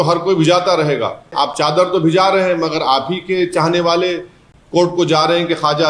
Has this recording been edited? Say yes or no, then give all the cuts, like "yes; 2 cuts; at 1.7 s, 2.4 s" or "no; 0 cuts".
yes; 1 cut; at 1.3 s